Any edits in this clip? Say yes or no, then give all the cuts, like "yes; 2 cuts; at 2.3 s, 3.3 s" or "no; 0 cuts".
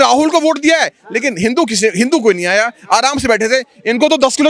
no; 0 cuts